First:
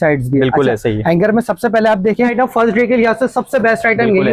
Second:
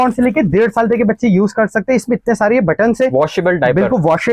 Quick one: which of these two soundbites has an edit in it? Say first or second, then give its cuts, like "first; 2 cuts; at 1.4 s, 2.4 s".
first; 1 cut; at 2.3 s